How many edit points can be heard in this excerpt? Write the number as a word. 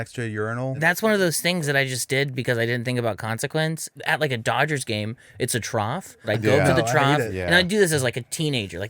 three